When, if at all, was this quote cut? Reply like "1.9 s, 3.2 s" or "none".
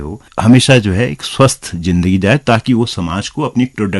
none